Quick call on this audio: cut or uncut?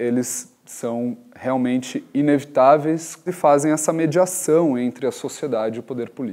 cut